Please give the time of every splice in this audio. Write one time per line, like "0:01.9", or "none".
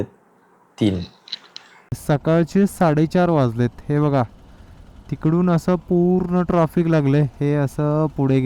0:02.0